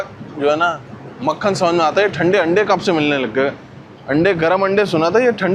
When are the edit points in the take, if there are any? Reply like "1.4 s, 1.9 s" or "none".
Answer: none